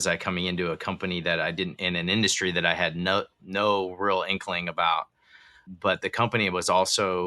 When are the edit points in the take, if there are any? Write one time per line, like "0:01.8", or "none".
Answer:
0:05.6